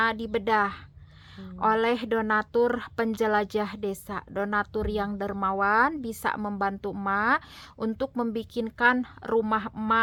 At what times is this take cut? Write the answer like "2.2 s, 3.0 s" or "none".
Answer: none